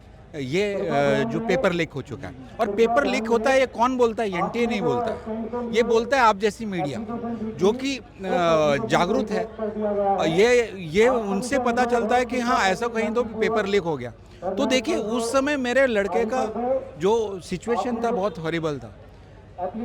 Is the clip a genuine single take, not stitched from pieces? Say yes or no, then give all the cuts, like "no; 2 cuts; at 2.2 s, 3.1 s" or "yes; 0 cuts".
yes; 0 cuts